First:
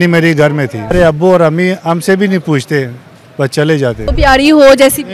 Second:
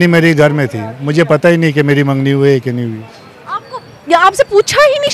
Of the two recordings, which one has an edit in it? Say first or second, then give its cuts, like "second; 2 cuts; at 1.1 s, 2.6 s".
first; 2 cuts; at 0.9 s, 4.1 s